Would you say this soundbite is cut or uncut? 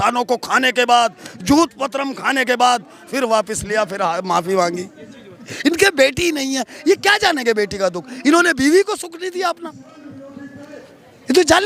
cut